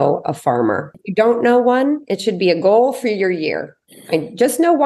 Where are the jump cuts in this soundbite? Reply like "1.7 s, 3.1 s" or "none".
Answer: 1.0 s